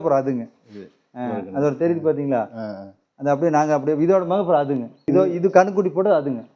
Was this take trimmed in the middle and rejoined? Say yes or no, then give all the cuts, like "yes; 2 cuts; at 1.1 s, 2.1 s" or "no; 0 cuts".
yes; 1 cut; at 5.0 s